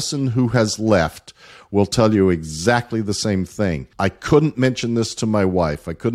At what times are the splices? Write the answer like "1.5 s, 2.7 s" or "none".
3.9 s